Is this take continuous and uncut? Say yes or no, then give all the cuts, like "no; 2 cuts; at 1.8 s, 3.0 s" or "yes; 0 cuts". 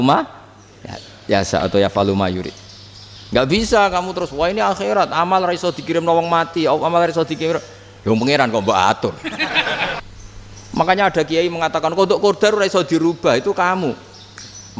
no; 1 cut; at 10.0 s